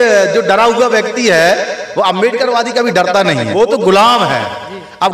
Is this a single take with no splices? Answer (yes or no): no